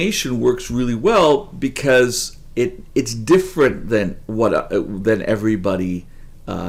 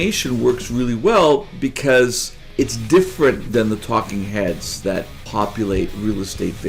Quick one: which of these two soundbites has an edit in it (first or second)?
second